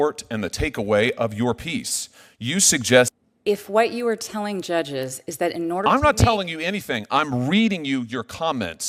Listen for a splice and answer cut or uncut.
cut